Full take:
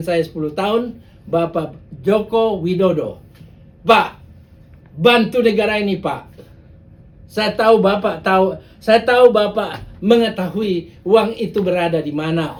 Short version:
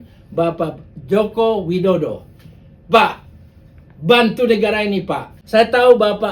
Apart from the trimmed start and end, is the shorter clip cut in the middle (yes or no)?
yes